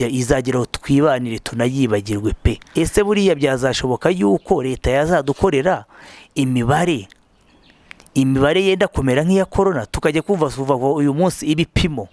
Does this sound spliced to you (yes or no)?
yes